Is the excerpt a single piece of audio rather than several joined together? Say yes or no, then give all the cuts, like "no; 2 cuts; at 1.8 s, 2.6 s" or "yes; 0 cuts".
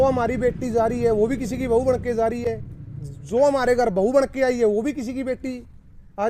yes; 0 cuts